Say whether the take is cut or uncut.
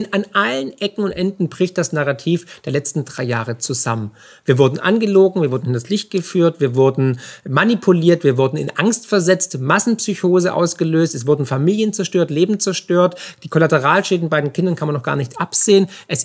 uncut